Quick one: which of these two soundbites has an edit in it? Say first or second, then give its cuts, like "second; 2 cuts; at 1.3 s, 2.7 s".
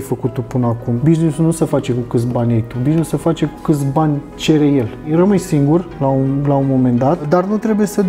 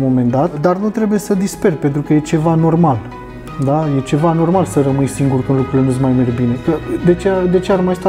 first; 2 cuts; at 1.0 s, 5.1 s